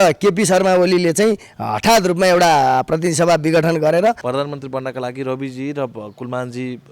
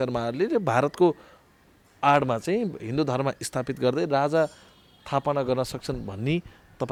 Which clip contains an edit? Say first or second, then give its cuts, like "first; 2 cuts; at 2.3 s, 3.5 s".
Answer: first; 1 cut; at 4.2 s